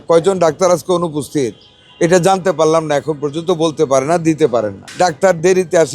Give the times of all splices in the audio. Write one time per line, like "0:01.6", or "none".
0:04.8